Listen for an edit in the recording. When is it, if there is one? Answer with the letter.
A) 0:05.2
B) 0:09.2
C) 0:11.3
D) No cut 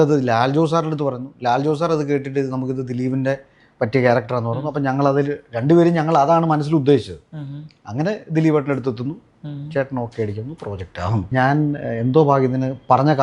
C